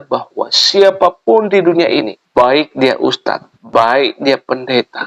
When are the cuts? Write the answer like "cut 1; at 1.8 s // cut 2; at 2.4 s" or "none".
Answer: cut 1; at 2.2 s // cut 2; at 3.5 s